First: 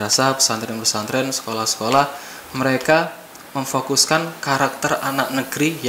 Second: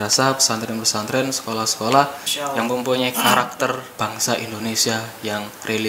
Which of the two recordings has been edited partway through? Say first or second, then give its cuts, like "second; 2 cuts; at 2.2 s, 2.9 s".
second; 2 cuts; at 2.3 s, 3.9 s